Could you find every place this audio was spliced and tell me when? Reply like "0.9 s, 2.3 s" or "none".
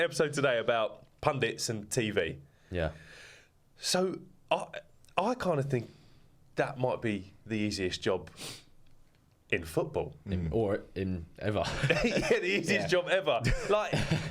none

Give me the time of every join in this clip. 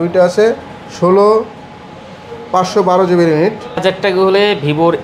3.8 s

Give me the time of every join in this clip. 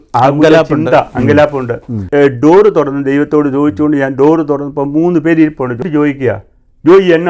2.0 s, 5.8 s

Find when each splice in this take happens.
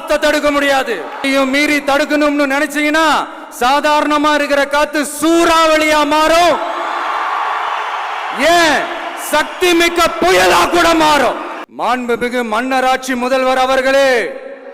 1.2 s, 11.6 s

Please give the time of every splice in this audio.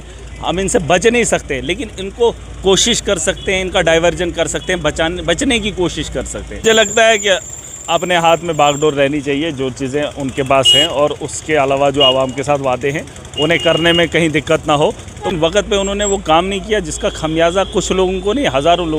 6.6 s, 15.3 s

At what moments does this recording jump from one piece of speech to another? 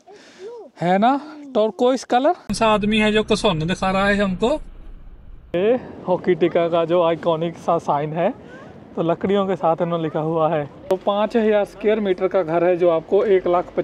2.5 s, 5.5 s, 10.9 s

